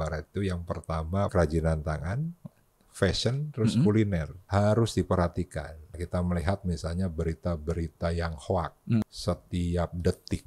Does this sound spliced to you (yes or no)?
yes